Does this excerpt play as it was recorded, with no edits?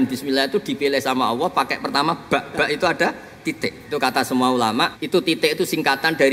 no; 2 cuts; at 3.4 s, 5.0 s

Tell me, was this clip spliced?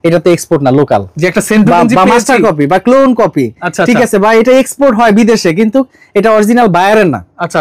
no; 0 cuts

